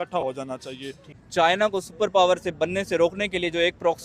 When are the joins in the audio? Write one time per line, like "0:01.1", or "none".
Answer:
0:01.2